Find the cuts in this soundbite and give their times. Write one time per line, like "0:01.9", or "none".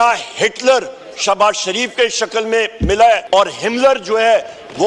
0:03.2